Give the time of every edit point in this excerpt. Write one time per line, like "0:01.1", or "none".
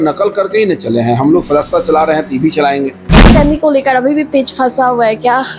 0:03.2